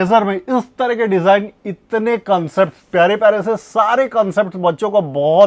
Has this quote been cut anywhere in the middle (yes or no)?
no